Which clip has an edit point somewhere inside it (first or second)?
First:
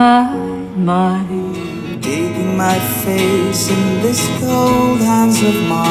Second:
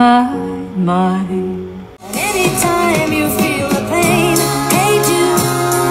first